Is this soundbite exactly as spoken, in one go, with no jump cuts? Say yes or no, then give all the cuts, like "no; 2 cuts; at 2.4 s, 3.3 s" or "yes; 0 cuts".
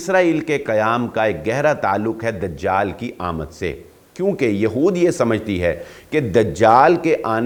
yes; 0 cuts